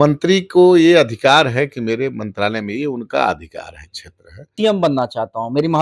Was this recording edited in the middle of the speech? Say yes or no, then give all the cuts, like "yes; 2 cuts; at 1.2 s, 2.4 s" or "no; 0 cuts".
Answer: yes; 1 cut; at 4.5 s